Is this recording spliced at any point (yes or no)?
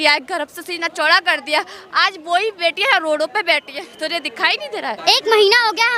yes